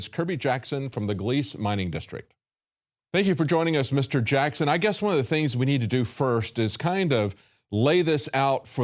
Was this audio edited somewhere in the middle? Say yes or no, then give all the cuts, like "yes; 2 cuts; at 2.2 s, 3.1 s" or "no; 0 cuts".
no; 0 cuts